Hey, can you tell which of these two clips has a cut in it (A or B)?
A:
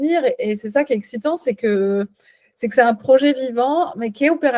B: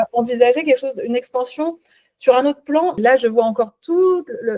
B